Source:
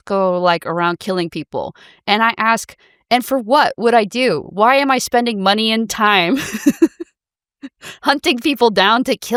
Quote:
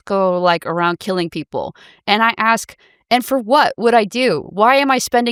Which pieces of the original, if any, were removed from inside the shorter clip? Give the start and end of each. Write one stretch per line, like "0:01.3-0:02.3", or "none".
none